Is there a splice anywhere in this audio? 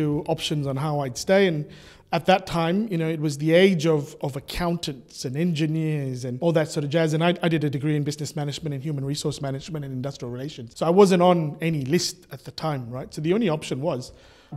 no; 0 cuts

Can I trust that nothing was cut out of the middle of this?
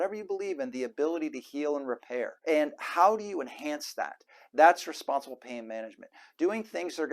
no; 1 cut; at 2.4 s

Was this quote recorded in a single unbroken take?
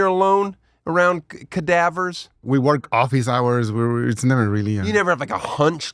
no; 1 cut; at 2.3 s

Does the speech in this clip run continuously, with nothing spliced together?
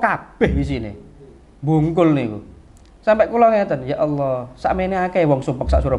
yes; 0 cuts

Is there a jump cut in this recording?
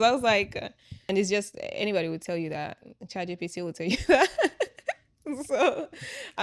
yes; 1 cut; at 1.0 s

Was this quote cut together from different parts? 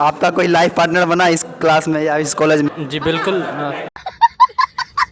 yes; 2 cuts; at 2.7 s, 3.9 s

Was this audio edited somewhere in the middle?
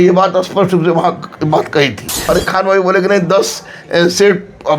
yes; 1 cut; at 2.3 s

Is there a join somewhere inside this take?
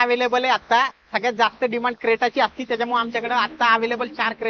no; 0 cuts

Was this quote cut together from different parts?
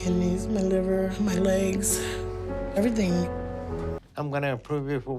yes; 1 cut; at 4.0 s

